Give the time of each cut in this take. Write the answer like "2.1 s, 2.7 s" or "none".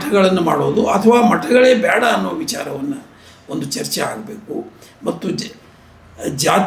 none